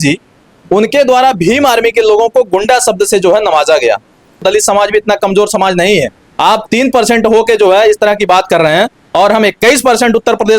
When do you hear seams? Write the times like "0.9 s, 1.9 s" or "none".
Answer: 4.4 s